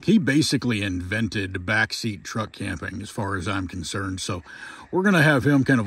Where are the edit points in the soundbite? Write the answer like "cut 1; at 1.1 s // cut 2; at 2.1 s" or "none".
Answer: none